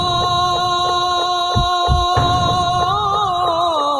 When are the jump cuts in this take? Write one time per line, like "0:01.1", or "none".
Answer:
none